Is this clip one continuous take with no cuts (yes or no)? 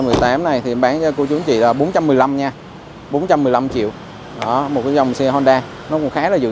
yes